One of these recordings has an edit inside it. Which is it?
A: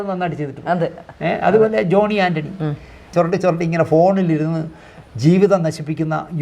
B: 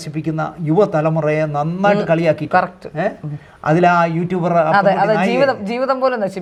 A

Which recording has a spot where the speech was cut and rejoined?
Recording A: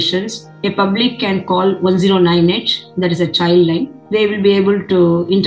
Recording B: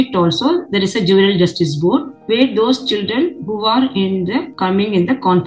A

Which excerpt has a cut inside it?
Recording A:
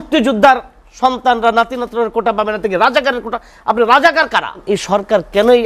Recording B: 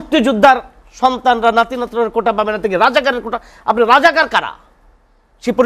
A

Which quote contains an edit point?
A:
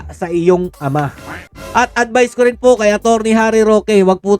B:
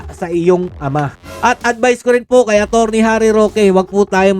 B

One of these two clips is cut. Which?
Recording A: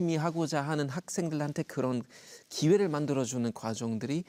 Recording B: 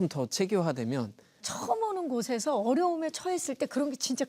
B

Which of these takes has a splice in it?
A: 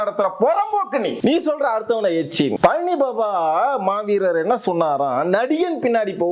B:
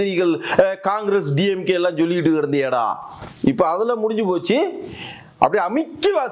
A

